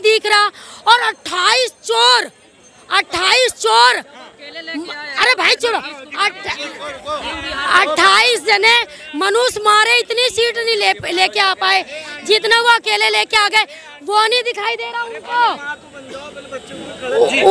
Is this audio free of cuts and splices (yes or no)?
yes